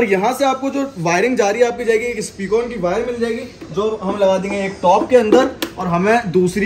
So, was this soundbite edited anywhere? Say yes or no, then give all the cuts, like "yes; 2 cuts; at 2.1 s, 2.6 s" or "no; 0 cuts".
no; 0 cuts